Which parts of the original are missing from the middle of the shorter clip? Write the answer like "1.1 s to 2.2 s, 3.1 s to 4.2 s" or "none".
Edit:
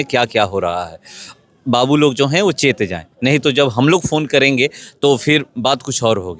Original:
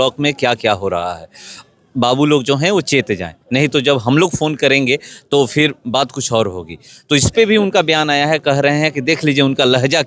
none